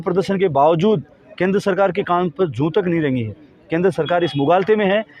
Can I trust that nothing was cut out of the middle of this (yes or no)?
yes